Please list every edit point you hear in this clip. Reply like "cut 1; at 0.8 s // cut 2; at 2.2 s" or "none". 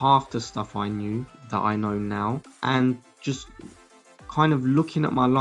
cut 1; at 1.4 s // cut 2; at 2.5 s